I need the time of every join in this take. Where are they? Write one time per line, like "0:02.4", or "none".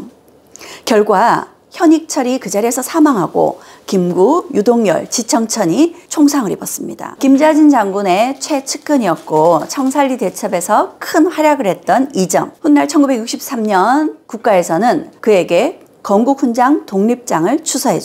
0:07.2